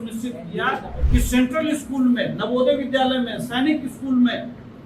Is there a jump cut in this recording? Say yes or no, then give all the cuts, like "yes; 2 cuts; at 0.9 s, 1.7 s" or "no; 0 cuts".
yes; 1 cut; at 1.0 s